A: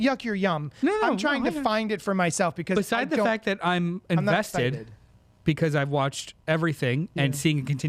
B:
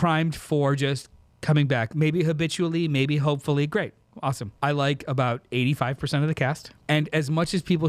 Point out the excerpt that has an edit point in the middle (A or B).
B